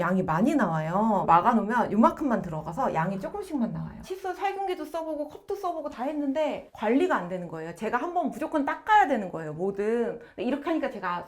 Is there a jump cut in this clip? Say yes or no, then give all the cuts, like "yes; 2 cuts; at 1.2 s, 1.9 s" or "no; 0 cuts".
yes; 3 cuts; at 1.3 s, 4.1 s, 6.7 s